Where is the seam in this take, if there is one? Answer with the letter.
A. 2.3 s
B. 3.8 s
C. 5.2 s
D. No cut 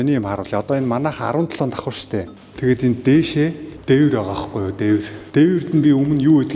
A